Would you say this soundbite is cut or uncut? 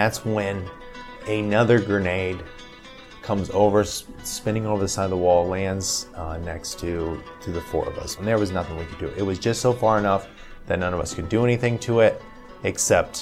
cut